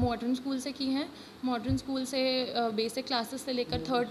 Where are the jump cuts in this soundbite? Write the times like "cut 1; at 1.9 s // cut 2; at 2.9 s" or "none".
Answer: none